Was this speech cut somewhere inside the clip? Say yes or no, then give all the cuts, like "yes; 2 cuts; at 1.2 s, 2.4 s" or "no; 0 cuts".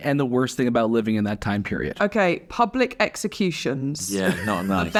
no; 0 cuts